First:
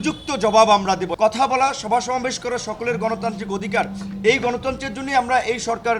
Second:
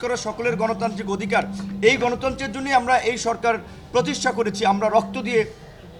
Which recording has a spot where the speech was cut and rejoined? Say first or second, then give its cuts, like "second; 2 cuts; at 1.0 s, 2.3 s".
first; 1 cut; at 1.1 s